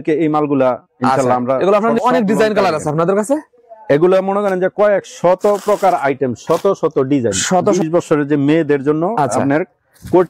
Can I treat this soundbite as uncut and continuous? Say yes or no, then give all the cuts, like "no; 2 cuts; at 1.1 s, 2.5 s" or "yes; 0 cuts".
no; 2 cuts; at 2.0 s, 7.8 s